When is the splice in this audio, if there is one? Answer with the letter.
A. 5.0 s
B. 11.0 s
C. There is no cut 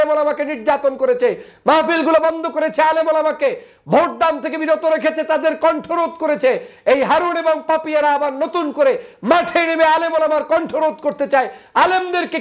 C